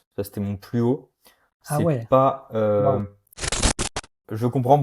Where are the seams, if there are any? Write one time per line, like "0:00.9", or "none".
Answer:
0:03.8